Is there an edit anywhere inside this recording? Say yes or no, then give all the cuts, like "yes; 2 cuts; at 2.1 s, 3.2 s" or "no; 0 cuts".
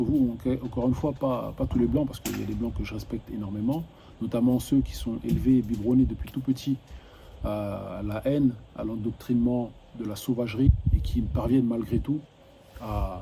yes; 1 cut; at 10.7 s